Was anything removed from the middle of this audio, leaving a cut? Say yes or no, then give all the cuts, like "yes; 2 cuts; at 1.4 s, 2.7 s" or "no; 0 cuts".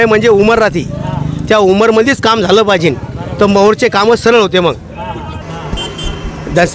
yes; 1 cut; at 5.5 s